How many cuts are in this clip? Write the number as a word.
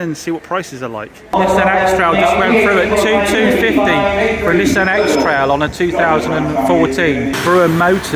two